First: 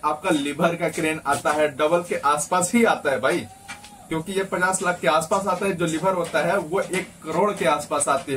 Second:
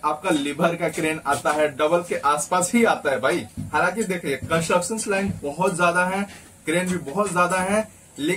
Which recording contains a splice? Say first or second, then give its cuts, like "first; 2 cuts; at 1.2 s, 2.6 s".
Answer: second; 1 cut; at 3.6 s